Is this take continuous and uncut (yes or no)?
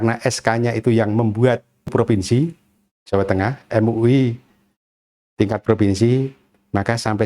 no